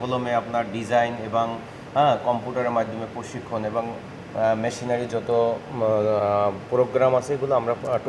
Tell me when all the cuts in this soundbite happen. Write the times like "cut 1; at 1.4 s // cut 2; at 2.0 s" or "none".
none